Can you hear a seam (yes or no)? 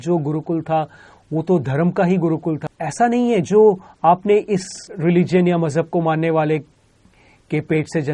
yes